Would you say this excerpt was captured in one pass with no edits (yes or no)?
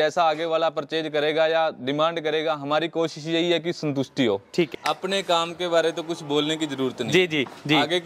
no